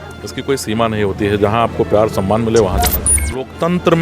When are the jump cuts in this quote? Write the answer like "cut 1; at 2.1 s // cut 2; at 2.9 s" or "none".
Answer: cut 1; at 3.0 s